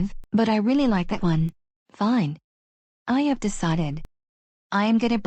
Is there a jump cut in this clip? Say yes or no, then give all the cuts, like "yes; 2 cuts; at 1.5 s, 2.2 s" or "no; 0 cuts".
yes; 1 cut; at 1.2 s